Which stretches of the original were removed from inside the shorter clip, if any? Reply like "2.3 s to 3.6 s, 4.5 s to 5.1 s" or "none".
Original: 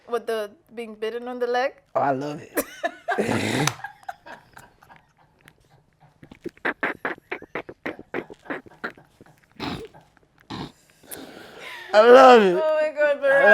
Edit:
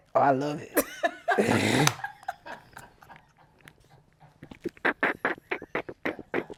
none

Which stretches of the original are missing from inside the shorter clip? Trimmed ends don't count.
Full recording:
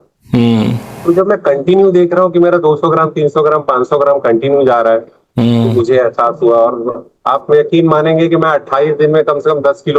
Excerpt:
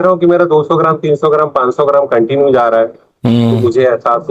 none

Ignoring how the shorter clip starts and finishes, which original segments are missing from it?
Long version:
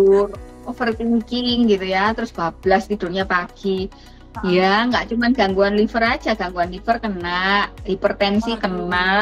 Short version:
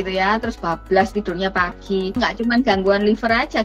3.9 s to 4.9 s

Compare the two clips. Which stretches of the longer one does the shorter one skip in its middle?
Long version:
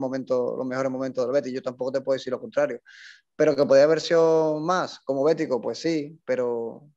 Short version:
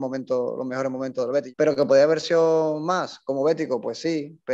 1.5 s to 3.3 s

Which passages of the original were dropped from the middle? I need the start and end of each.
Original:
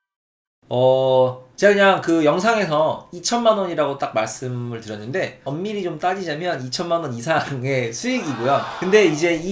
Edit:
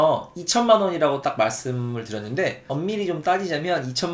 none

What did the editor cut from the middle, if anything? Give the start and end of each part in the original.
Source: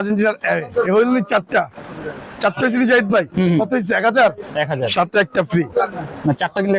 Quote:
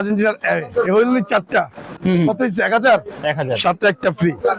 2.0 s to 3.3 s

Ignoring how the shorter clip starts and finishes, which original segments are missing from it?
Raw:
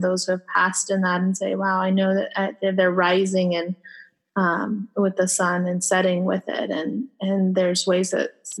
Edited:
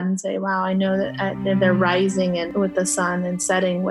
3.7 s to 4.9 s

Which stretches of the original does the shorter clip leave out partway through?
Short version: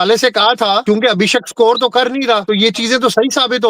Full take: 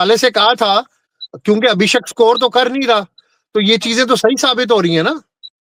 0.8 s to 1.4 s, 3.0 s to 3.5 s

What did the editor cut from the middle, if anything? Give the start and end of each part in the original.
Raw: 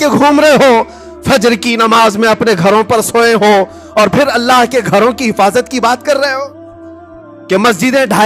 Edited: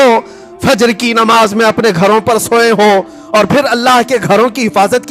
none

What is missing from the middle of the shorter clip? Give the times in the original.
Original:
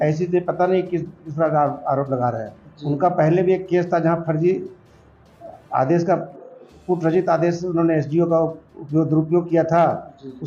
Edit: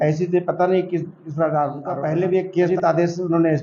1.8 s to 2.9 s, 3.8 s to 7.1 s

